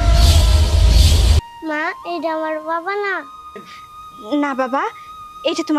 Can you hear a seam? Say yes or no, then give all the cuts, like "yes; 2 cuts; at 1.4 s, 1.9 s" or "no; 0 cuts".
yes; 1 cut; at 1.3 s